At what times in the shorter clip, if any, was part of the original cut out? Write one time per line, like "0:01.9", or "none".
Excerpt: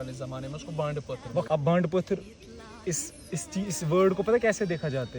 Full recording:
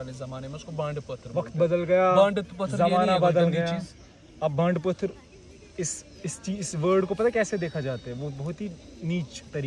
0:01.5